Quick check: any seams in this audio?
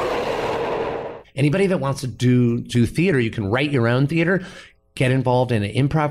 yes; 1 cut; at 1.2 s

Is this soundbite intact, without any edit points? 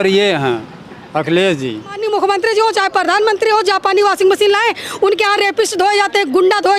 no; 1 cut; at 2.0 s

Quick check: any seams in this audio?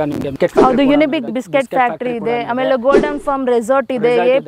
yes; 1 cut; at 1.3 s

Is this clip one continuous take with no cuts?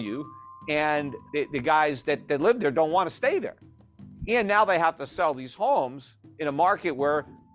no; 1 cut; at 1.2 s

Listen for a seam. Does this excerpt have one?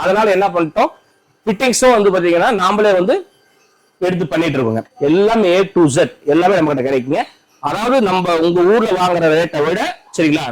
yes; 1 cut; at 4.9 s

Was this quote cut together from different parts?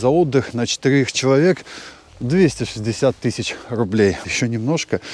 yes; 1 cut; at 4.2 s

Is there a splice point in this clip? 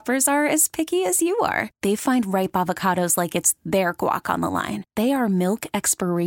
no; 0 cuts

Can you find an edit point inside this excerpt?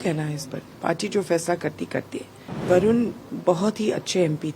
yes; 2 cuts; at 2.6 s, 3.3 s

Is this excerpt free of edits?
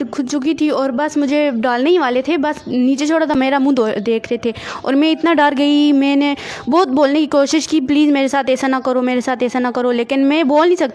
yes; 0 cuts

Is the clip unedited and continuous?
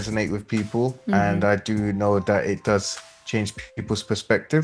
no; 1 cut; at 1.0 s

